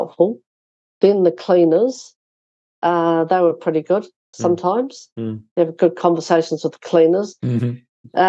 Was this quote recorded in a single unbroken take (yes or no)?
yes